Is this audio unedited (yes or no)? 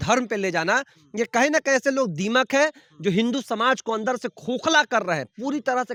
yes